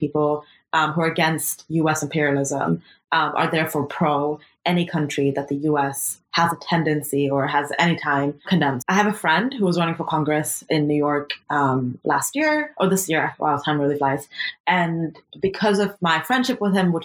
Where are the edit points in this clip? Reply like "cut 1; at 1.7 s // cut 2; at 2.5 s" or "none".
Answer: cut 1; at 8.6 s